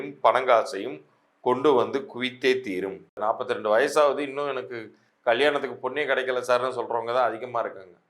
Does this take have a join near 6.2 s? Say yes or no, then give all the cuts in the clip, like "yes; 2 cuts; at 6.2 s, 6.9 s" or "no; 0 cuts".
no; 1 cut; at 3.2 s